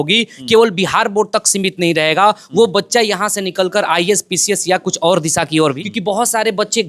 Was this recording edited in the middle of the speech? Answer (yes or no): yes